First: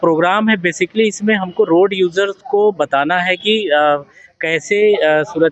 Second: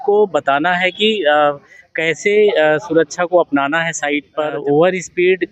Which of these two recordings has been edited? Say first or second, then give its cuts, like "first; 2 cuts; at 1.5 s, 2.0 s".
second; 1 cut; at 4.5 s